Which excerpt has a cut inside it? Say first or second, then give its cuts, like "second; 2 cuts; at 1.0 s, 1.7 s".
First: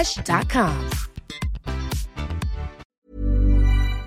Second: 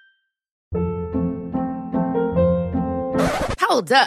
first; 1 cut; at 2.8 s